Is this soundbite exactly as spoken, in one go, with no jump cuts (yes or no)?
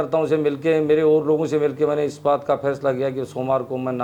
yes